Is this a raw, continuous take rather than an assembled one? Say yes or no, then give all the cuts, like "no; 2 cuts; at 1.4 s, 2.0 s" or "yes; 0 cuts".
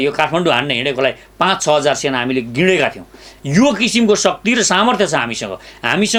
yes; 0 cuts